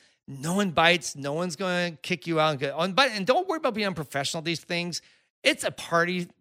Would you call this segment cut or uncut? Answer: uncut